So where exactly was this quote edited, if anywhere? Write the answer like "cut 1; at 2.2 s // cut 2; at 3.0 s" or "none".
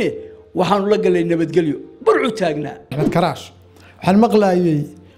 cut 1; at 3.0 s